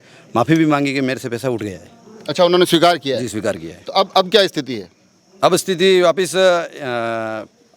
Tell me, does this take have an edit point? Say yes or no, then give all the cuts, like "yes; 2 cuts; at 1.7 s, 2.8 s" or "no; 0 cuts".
no; 0 cuts